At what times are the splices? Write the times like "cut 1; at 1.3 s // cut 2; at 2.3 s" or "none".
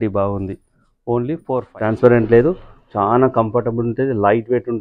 cut 1; at 1.7 s